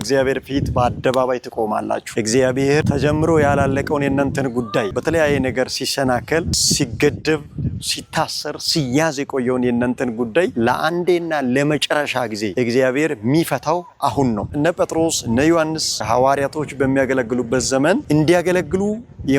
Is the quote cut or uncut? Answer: cut